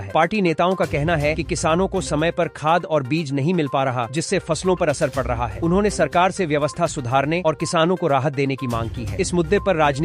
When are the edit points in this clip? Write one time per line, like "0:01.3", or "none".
none